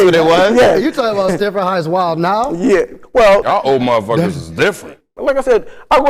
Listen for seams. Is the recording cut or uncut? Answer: cut